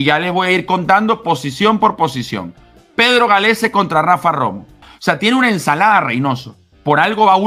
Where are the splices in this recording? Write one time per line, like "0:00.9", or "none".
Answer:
0:04.8